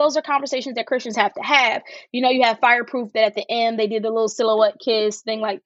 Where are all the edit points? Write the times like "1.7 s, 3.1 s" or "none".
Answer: none